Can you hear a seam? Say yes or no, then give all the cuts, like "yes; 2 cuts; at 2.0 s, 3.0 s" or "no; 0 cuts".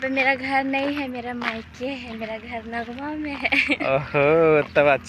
no; 0 cuts